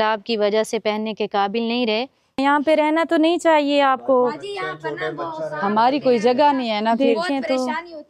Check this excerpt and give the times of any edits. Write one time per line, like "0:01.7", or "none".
0:02.4